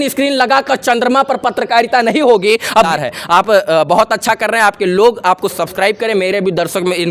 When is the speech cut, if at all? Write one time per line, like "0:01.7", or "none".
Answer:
0:02.9